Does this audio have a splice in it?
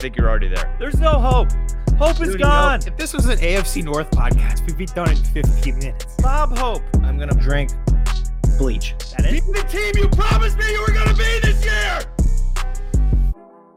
no; 0 cuts

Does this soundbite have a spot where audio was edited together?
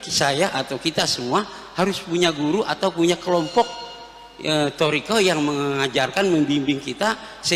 no; 0 cuts

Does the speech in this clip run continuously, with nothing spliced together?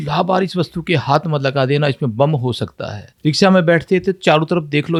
yes; 0 cuts

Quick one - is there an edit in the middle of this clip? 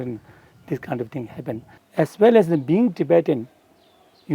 yes; 1 cut; at 1.7 s

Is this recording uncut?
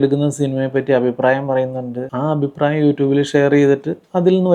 yes; 0 cuts

